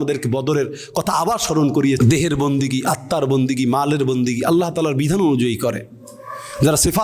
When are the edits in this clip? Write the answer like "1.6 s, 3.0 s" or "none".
2.0 s